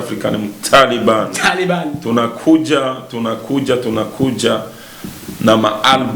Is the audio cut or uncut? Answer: uncut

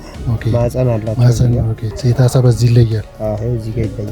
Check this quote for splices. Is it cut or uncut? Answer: cut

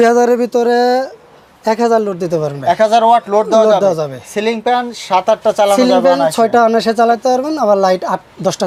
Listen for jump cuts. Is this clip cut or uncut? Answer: uncut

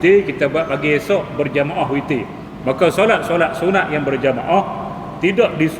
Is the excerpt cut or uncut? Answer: cut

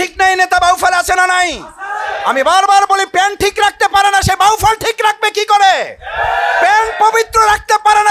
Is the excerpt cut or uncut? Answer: uncut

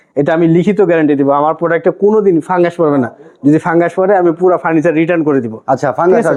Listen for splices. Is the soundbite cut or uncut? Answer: uncut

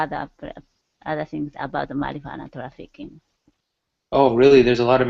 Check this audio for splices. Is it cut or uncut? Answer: uncut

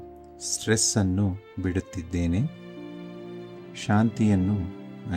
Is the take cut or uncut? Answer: uncut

